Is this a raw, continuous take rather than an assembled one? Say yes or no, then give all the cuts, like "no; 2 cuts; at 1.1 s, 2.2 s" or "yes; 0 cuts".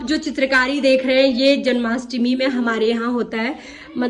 yes; 0 cuts